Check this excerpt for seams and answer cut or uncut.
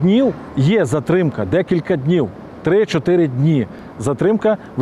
uncut